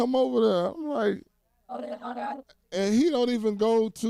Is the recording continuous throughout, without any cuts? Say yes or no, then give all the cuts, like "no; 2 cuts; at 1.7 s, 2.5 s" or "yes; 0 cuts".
yes; 0 cuts